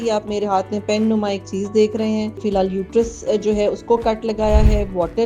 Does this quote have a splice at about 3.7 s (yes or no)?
no